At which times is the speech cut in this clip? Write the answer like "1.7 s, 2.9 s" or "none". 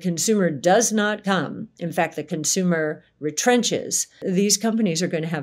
4.1 s

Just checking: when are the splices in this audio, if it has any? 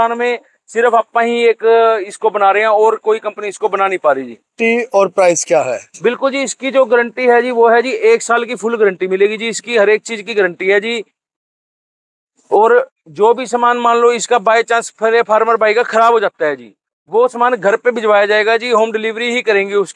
4.6 s

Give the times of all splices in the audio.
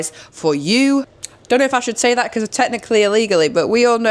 1.2 s

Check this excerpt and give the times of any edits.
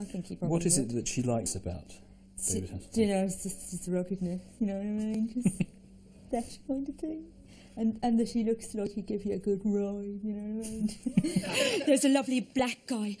1.3 s

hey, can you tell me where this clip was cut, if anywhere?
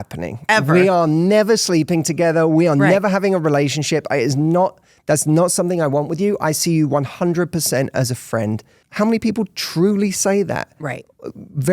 8.8 s

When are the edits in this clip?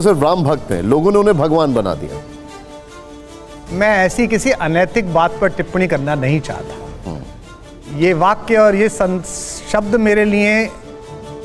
none

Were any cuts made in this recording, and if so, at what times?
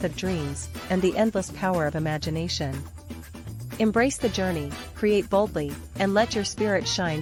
none

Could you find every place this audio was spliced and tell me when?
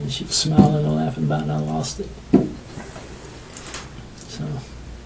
none

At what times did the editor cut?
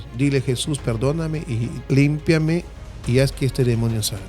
1.9 s

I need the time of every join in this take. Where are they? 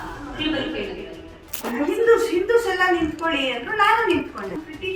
1.6 s

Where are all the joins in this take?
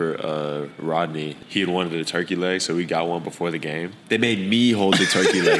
1.4 s, 3.9 s

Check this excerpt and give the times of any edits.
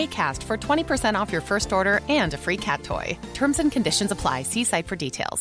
none

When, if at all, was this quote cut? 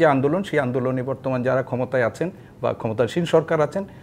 none

